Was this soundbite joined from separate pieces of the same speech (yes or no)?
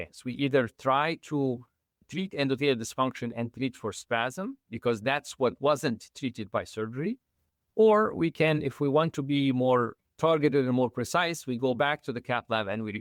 no